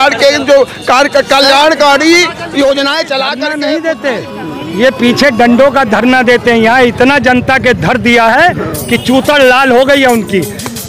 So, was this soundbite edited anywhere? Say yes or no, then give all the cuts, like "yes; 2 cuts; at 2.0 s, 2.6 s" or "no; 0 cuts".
yes; 1 cut; at 3.5 s